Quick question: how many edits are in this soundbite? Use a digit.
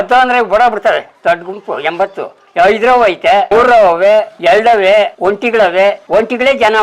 4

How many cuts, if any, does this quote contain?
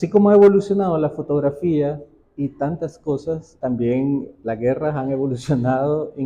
1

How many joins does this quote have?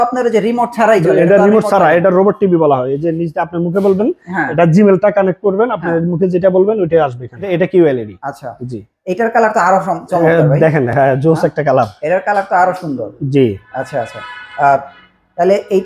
1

